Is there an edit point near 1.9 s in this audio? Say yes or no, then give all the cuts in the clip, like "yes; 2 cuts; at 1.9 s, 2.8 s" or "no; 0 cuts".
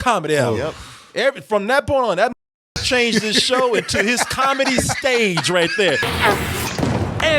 no; 1 cut; at 6.1 s